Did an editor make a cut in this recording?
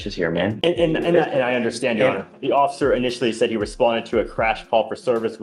no; 0 cuts

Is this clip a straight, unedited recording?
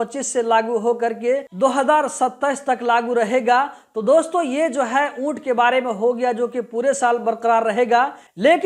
yes; 0 cuts

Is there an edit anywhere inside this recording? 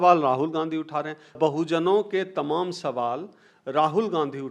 yes; 1 cut; at 1.3 s

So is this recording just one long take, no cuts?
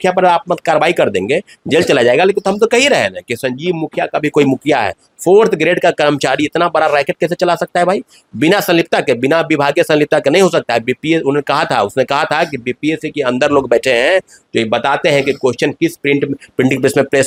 yes; 0 cuts

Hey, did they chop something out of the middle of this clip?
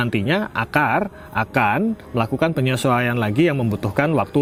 no; 0 cuts

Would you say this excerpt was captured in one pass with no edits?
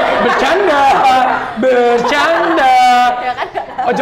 yes; 0 cuts

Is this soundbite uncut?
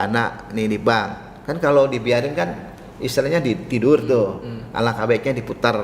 yes; 0 cuts

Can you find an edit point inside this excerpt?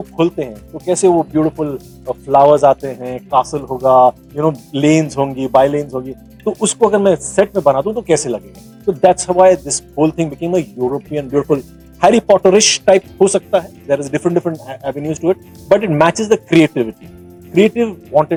no; 0 cuts

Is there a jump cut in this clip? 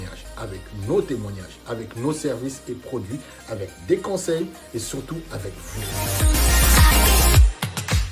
yes; 1 cut; at 5.8 s

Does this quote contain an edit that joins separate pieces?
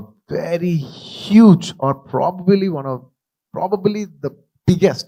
no; 0 cuts

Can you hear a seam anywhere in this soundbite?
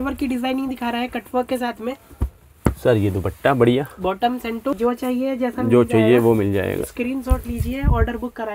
yes; 1 cut; at 4.7 s

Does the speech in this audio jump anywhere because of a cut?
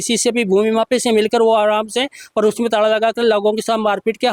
no; 0 cuts

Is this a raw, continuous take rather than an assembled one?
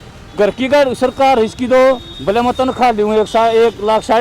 no; 1 cut; at 2.1 s

